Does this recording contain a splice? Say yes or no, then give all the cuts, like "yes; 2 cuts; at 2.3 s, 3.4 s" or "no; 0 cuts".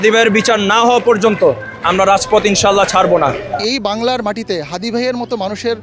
yes; 1 cut; at 3.5 s